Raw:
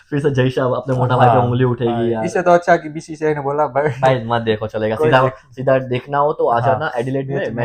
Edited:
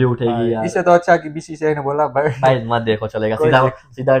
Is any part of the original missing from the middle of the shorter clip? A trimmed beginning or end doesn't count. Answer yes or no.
no